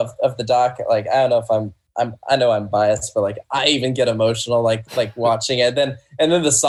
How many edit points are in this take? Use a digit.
0